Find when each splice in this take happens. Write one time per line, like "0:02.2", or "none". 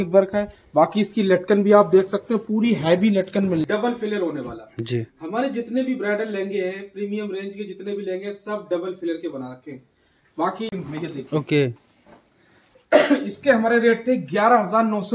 0:03.6
0:10.9

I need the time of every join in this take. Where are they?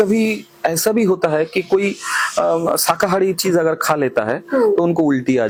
none

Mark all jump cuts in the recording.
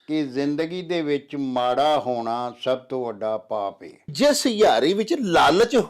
0:04.1

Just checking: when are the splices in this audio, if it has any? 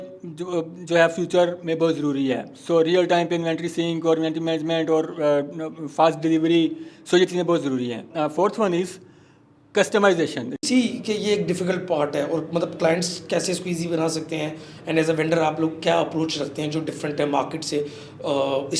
0:08.1
0:10.6

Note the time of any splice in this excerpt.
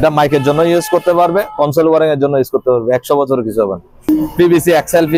0:04.0

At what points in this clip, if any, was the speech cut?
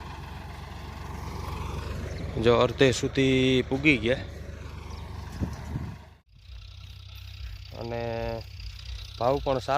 0:06.0

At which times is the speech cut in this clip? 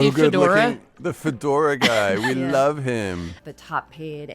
0:03.3

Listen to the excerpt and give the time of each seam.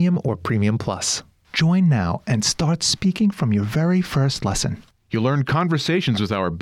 0:01.2

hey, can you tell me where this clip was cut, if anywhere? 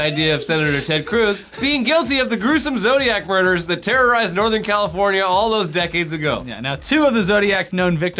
0:03.4

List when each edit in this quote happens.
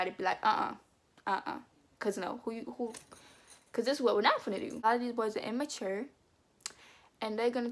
0:04.8

